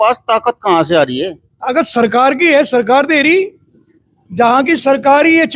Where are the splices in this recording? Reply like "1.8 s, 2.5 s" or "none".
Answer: none